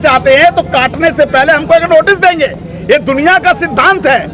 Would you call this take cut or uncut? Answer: uncut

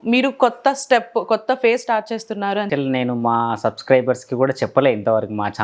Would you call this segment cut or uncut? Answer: cut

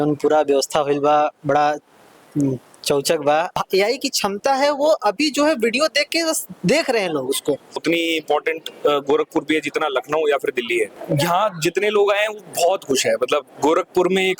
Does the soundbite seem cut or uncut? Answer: cut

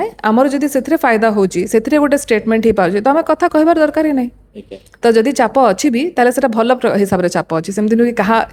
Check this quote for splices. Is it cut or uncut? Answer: uncut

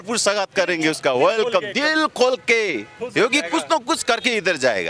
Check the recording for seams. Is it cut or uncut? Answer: cut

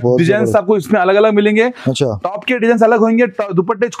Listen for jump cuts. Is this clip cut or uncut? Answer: uncut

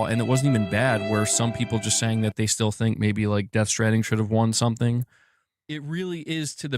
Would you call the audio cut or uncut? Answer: cut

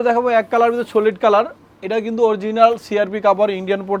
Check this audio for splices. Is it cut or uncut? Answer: uncut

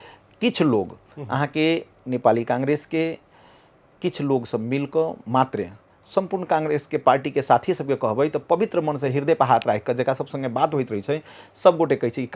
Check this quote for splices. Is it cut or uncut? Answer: uncut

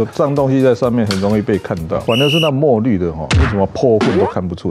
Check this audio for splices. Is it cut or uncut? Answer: cut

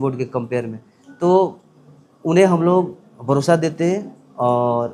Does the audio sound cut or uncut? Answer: uncut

